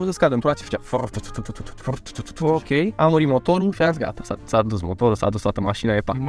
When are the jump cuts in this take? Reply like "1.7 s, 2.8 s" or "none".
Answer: none